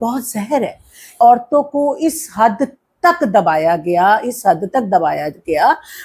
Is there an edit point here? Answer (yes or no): yes